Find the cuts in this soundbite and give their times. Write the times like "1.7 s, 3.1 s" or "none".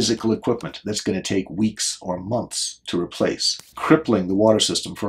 3.7 s

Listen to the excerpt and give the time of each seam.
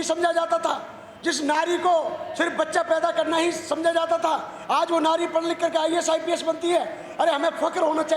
none

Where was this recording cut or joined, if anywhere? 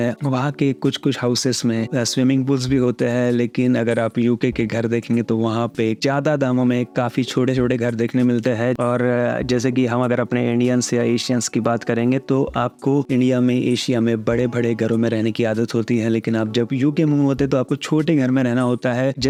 none

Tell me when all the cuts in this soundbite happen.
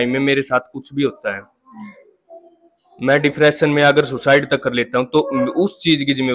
none

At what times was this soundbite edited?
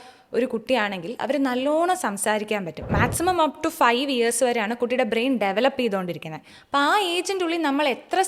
2.8 s

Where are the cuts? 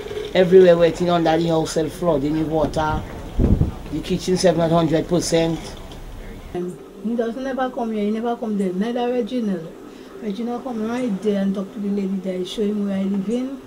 6.5 s

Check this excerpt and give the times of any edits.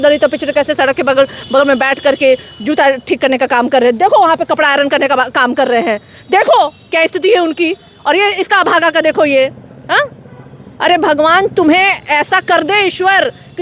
none

